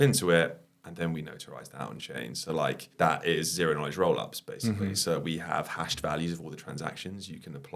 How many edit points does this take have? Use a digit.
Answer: 1